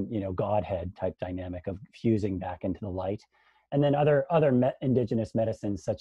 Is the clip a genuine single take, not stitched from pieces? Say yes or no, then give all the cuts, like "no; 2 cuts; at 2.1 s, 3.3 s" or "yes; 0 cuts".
yes; 0 cuts